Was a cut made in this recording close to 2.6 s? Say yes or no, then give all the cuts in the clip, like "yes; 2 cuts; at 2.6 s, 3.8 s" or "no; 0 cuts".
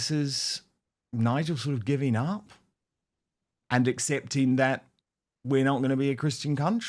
no; 0 cuts